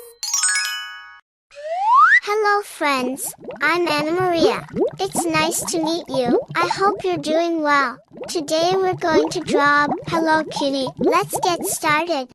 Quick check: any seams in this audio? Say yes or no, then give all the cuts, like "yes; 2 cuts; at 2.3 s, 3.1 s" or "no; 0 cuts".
yes; 2 cuts; at 10.0 s, 11.1 s